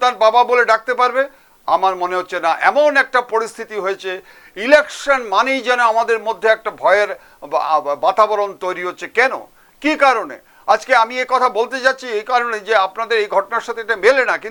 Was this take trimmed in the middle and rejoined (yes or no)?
no